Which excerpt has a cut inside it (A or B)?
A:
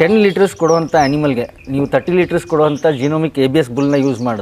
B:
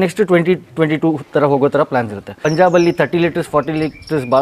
B